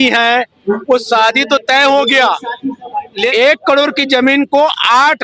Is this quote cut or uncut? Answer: cut